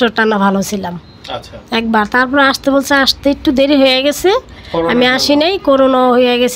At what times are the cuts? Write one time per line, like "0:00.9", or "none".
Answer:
none